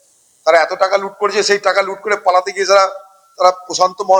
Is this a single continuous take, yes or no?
yes